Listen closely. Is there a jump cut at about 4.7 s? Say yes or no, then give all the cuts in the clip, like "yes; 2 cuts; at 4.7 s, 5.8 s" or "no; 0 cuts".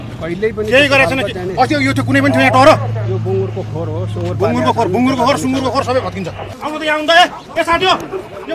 no; 1 cut; at 6.4 s